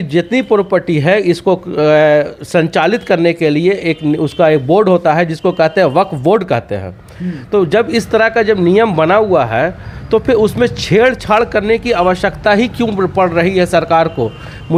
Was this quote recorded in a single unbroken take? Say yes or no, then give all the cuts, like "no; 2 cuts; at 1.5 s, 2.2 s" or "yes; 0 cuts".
yes; 0 cuts